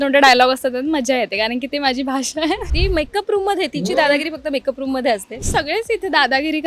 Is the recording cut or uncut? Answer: cut